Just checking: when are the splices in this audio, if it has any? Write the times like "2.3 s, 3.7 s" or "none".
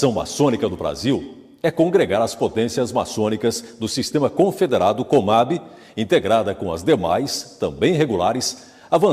4.9 s

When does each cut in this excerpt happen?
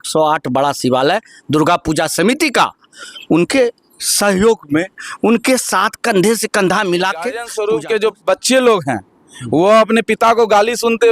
7.5 s

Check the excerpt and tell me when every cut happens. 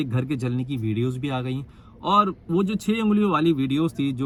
none

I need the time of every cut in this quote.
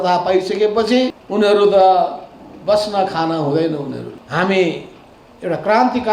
1.2 s, 4.1 s

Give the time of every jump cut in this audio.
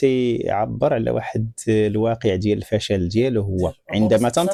none

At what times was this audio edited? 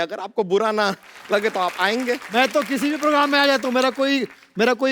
2.2 s

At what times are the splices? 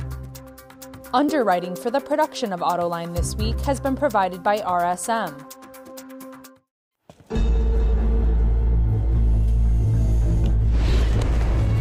1.1 s, 5.4 s, 6.4 s

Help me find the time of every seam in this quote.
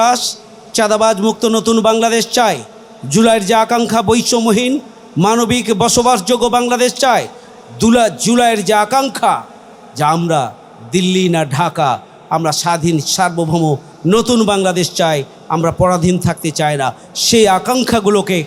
none

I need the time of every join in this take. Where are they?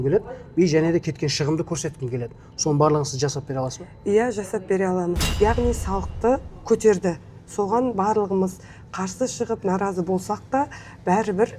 5.3 s

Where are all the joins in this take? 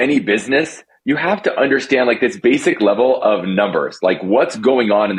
none

